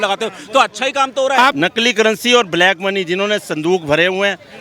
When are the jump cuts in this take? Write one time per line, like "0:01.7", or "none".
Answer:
0:01.5